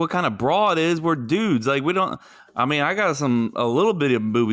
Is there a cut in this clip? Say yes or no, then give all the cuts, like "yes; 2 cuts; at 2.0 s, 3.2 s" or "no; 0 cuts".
no; 0 cuts